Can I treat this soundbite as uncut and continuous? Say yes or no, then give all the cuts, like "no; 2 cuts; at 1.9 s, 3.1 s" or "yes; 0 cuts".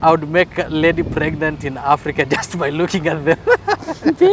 yes; 0 cuts